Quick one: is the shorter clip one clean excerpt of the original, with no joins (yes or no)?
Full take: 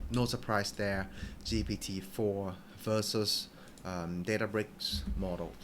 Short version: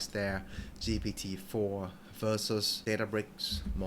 no